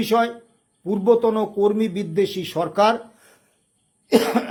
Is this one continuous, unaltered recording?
yes; 0 cuts

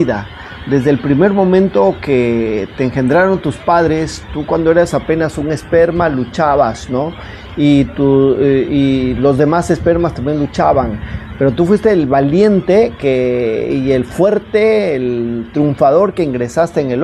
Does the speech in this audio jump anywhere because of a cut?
no; 0 cuts

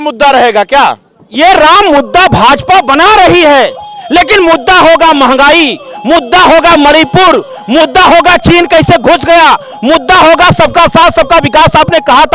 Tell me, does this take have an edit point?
no; 0 cuts

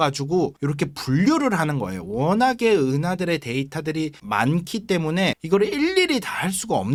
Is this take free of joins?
yes; 0 cuts

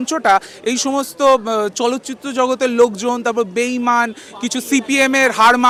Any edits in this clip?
no; 0 cuts

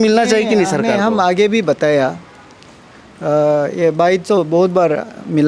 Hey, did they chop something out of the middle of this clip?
no; 0 cuts

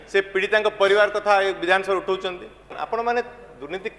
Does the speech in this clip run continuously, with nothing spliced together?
no; 1 cut; at 2.8 s

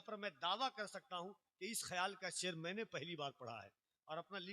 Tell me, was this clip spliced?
no; 0 cuts

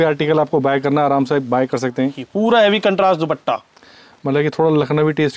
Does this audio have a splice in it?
yes; 1 cut; at 2.2 s

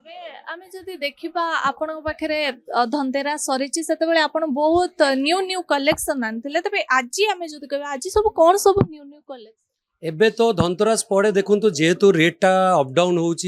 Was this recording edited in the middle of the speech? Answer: no; 0 cuts

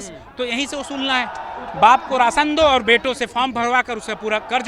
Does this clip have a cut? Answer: no; 0 cuts

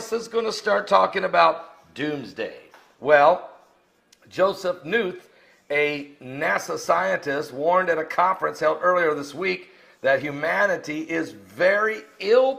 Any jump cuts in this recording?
yes; 1 cut; at 3.1 s

